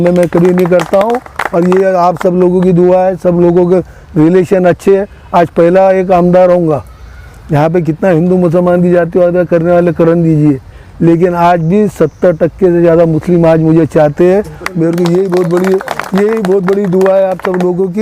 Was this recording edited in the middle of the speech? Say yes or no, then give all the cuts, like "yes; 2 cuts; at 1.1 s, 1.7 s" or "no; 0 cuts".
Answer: no; 0 cuts